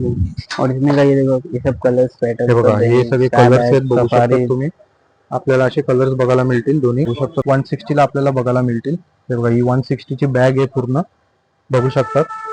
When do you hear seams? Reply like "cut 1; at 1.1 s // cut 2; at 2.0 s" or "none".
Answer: cut 1; at 7.3 s